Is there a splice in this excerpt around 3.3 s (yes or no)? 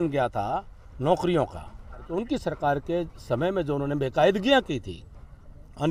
no